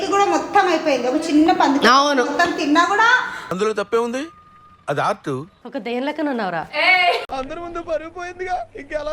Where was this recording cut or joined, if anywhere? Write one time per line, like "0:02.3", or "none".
0:05.5